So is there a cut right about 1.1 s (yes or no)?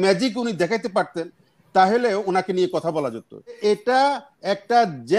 no